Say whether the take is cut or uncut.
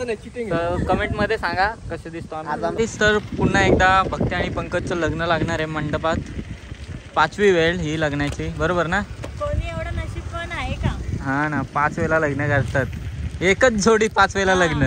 cut